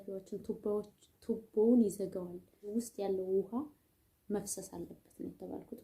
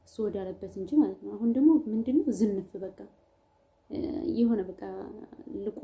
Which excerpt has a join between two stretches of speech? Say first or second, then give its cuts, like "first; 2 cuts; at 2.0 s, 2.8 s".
first; 1 cut; at 2.7 s